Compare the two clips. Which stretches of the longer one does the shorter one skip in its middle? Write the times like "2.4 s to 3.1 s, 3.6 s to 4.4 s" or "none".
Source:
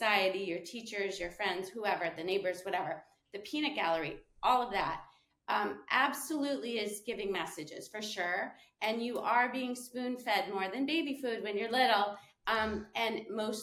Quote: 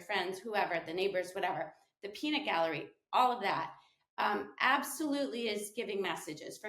none